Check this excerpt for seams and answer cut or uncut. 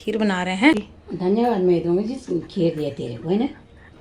cut